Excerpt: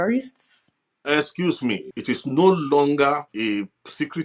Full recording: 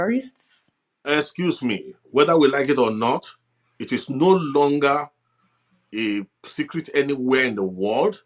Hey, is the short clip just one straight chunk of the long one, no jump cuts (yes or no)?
no